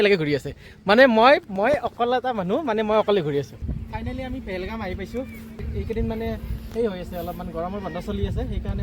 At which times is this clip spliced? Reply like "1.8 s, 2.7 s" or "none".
3.6 s, 5.6 s